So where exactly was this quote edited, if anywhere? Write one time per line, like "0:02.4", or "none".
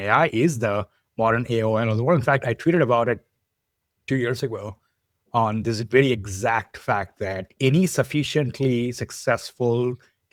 none